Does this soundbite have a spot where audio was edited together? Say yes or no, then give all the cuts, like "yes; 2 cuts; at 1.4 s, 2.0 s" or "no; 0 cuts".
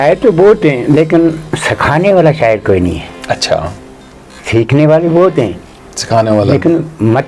no; 0 cuts